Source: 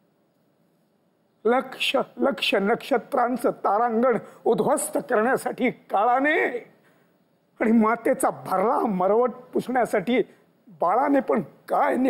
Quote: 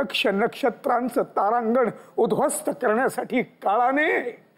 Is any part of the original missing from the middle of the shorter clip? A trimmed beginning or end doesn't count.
no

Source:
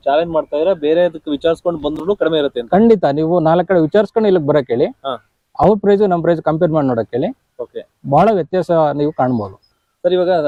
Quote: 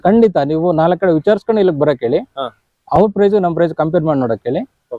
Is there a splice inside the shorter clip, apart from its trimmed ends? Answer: no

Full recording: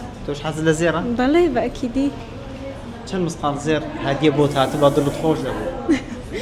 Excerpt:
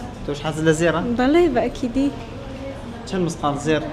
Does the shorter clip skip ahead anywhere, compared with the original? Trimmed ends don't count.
no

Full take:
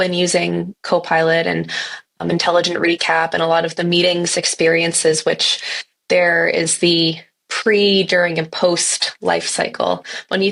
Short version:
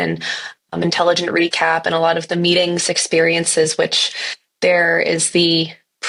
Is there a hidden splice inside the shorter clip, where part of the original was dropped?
no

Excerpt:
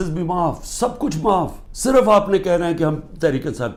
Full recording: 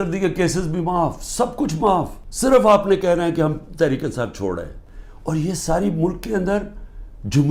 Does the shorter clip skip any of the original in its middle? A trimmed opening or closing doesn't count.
no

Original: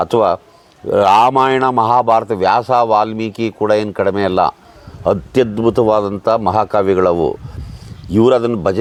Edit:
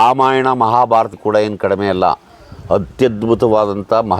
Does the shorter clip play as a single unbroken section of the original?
no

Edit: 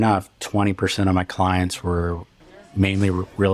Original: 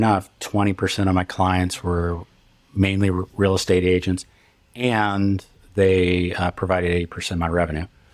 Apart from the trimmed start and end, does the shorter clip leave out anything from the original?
no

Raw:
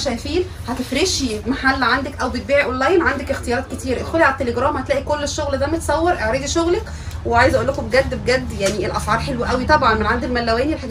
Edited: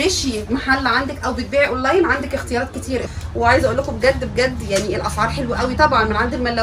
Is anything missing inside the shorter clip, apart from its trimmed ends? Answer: yes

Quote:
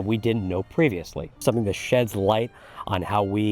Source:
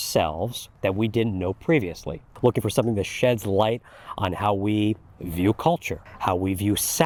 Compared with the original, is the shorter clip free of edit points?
no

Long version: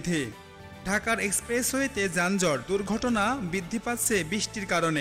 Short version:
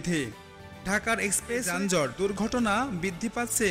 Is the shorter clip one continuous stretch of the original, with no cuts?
no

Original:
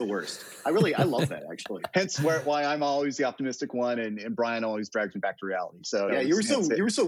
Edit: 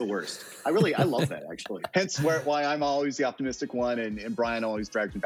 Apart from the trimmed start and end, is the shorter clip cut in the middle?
no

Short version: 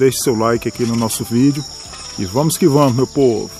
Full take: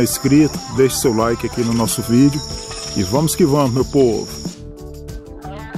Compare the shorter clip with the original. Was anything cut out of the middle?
no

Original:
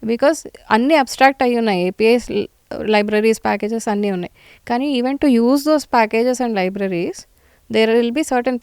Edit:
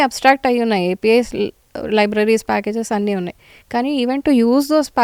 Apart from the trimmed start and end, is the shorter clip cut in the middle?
no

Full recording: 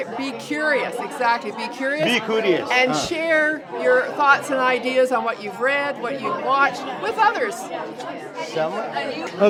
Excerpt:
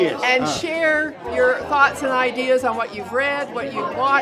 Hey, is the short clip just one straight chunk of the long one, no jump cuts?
yes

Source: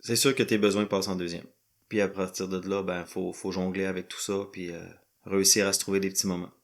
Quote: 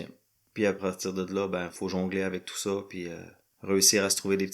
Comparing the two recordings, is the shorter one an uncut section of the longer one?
no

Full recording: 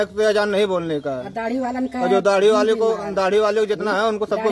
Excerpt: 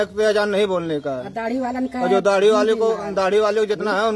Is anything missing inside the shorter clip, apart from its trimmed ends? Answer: no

